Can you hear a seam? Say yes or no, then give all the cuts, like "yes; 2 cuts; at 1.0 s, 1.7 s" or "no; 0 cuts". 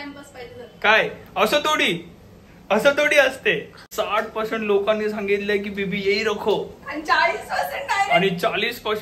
yes; 2 cuts; at 1.2 s, 3.7 s